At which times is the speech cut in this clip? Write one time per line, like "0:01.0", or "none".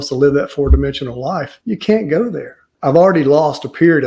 0:01.5
0:02.7